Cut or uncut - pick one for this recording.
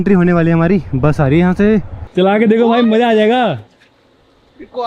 cut